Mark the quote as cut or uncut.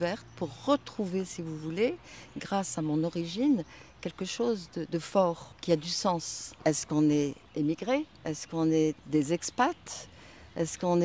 cut